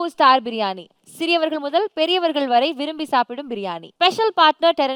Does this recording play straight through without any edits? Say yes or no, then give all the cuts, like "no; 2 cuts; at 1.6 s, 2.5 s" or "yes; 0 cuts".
yes; 0 cuts